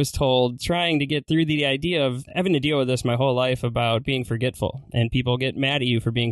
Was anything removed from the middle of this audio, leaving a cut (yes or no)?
yes